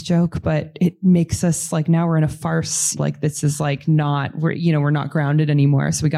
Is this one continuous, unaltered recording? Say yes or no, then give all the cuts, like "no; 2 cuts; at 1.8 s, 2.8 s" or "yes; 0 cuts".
no; 1 cut; at 3.0 s